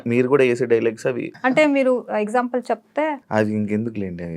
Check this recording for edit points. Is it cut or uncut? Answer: cut